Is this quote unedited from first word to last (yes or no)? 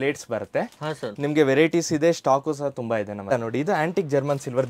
no